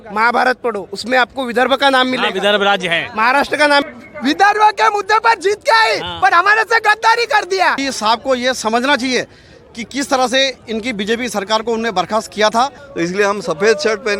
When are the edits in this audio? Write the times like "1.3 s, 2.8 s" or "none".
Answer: 3.8 s, 7.8 s, 12.8 s